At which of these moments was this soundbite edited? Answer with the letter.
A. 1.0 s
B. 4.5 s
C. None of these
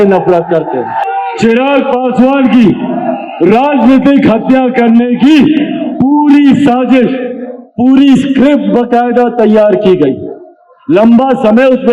A